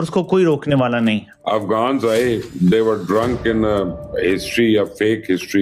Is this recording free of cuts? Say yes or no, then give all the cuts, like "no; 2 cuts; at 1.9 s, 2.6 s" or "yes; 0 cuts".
no; 1 cut; at 1.3 s